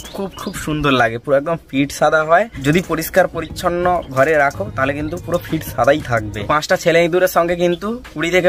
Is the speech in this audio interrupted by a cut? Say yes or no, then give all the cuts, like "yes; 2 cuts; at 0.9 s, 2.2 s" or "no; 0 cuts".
yes; 2 cuts; at 2.5 s, 6.5 s